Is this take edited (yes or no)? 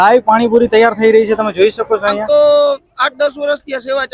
yes